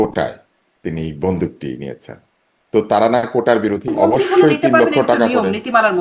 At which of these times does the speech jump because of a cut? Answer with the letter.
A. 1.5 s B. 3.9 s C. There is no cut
B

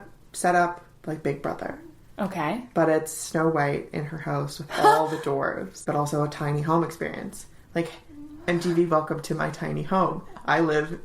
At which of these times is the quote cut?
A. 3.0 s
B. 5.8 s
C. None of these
B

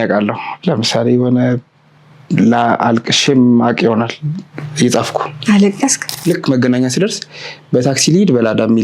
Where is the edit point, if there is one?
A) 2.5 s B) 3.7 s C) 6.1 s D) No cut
C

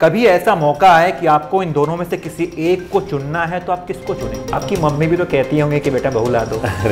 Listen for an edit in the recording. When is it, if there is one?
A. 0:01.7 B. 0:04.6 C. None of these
B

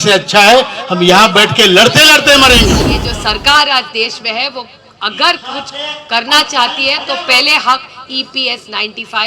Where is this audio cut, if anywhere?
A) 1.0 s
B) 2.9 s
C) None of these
B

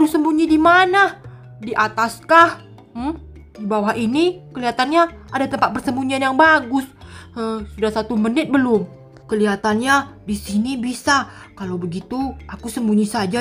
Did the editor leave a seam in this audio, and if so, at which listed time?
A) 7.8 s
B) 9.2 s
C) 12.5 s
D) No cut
D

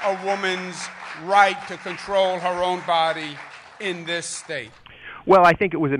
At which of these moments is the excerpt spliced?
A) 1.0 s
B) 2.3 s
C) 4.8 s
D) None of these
C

